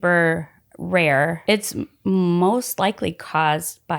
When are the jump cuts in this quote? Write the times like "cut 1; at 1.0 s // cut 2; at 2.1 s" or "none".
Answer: cut 1; at 1.4 s